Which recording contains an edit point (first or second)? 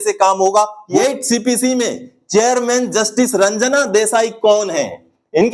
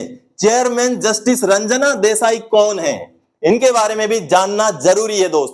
first